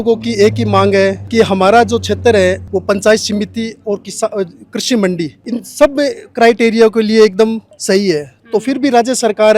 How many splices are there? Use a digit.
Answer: 4